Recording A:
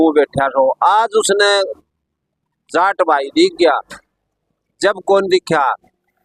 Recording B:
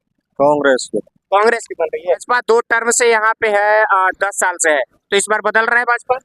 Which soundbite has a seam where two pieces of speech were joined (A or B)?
B